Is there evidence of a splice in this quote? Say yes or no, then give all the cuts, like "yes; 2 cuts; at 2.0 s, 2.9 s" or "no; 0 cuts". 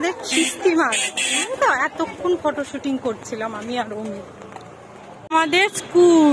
yes; 1 cut; at 5.3 s